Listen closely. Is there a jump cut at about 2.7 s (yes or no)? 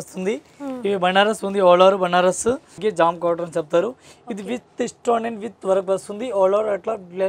yes